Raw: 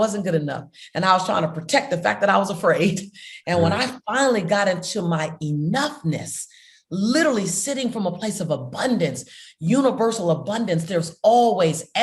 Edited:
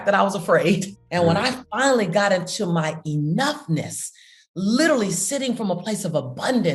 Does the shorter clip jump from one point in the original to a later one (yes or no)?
yes